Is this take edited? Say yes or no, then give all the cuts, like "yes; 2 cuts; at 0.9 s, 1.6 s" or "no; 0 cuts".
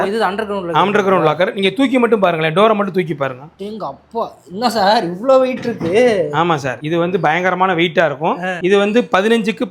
no; 0 cuts